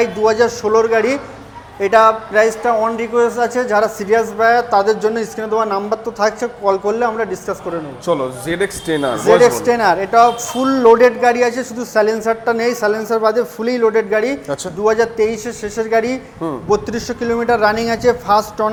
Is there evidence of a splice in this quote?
no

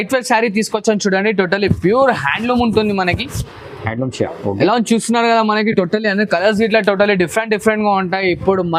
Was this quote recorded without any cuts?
yes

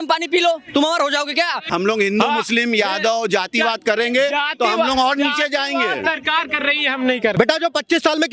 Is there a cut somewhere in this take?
yes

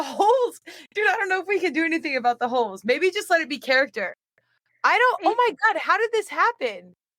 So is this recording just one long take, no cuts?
yes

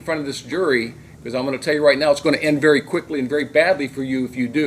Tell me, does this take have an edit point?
no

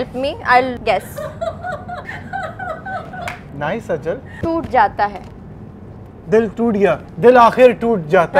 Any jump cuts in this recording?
yes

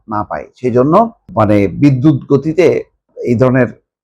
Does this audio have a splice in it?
yes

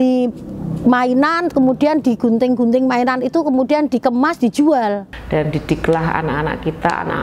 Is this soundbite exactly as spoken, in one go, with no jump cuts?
no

